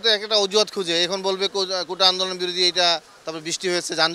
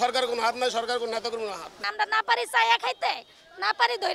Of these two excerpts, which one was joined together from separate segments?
second; 1 cut; at 1.8 s

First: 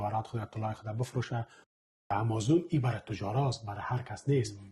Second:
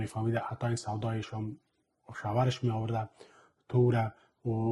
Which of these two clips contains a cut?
first; 1 cut; at 2.1 s

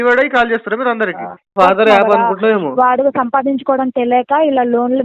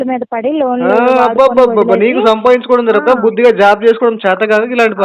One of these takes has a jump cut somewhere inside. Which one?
first; 1 cut; at 1.5 s

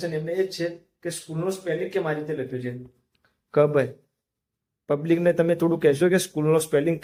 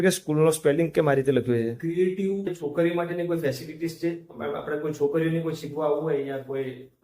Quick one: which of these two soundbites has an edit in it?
second; 1 cut; at 2.6 s

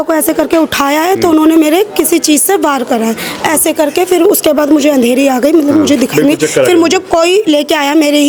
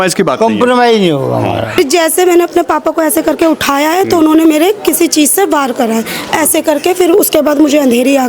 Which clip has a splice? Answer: second; 1 cut; at 1.8 s

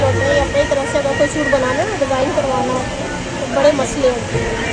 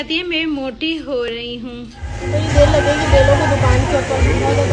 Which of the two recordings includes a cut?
second; 1 cut; at 2.2 s

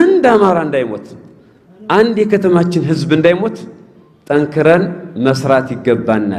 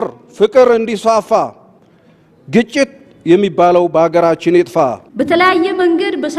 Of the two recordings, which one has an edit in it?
second; 1 cut; at 5.0 s

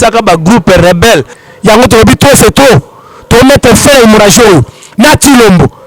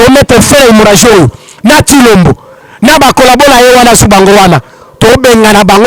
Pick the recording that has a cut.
first; 1 cut; at 1.4 s

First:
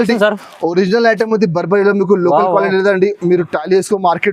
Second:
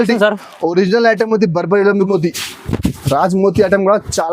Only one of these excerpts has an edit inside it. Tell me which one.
second; 1 cut; at 2.1 s

